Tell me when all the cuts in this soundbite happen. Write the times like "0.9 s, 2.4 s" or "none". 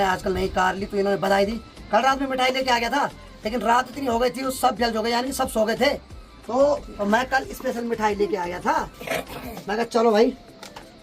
none